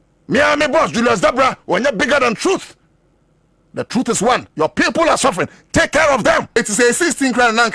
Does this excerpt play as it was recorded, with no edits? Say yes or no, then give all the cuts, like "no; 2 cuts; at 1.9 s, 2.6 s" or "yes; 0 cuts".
no; 1 cut; at 6.6 s